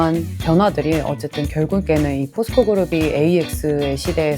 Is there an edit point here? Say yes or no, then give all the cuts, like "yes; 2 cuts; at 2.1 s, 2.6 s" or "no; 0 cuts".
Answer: yes; 1 cut; at 1.8 s